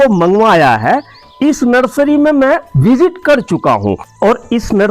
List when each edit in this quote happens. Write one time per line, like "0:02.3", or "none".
none